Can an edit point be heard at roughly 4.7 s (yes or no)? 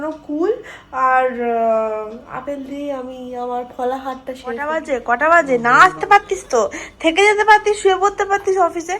yes